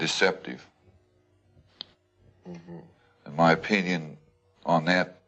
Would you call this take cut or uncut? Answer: uncut